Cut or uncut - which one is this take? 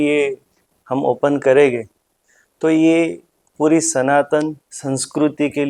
uncut